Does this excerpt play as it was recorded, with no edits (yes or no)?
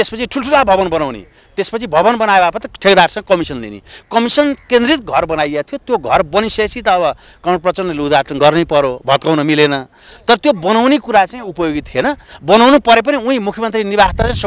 yes